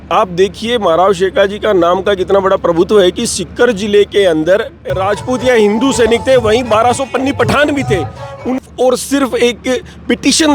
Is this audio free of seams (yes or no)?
no